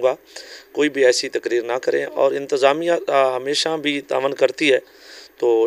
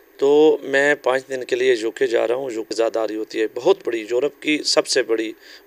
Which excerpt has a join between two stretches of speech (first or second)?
second